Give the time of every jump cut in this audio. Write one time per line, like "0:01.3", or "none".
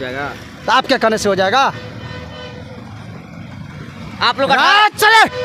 none